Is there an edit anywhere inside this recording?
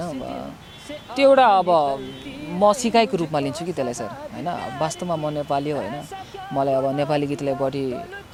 no; 0 cuts

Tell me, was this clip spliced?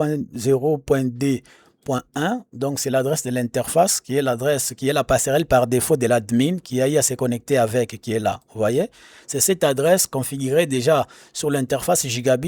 no; 0 cuts

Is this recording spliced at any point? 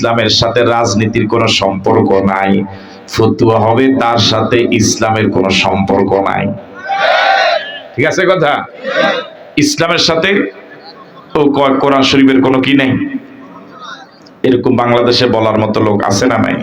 no; 0 cuts

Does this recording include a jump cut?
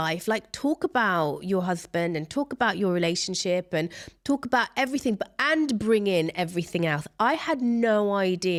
no; 0 cuts

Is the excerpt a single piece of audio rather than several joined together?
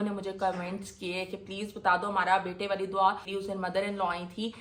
yes; 0 cuts

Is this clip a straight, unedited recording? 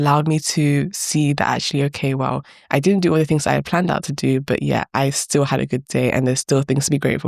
yes; 0 cuts

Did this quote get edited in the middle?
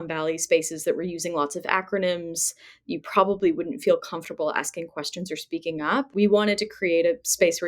yes; 1 cut; at 6.1 s

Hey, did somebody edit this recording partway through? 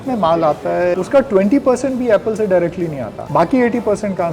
yes; 2 cuts; at 0.9 s, 3.1 s

